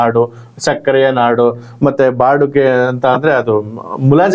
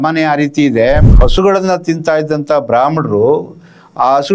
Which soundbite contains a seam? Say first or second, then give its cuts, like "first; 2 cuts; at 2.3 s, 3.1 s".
second; 1 cut; at 1.0 s